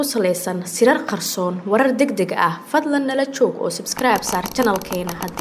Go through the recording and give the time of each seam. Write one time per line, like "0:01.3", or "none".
none